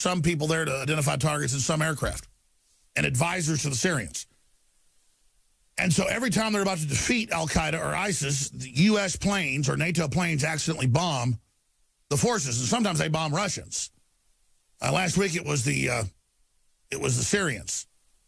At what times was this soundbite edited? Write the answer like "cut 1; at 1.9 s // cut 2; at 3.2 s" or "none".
cut 1; at 7.8 s